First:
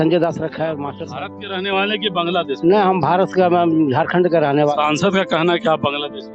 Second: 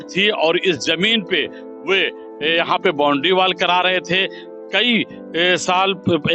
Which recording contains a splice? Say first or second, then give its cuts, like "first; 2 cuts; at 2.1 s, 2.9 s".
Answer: first; 1 cut; at 1.0 s